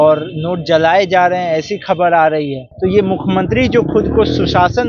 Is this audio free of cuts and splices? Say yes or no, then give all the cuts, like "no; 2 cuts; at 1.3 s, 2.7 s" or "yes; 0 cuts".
no; 1 cut; at 2.6 s